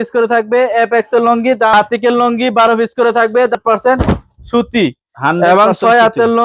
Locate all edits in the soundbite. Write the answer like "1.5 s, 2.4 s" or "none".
1.7 s, 3.5 s